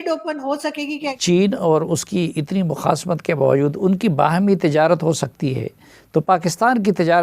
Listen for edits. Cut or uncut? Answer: cut